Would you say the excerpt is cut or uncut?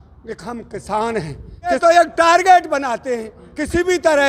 cut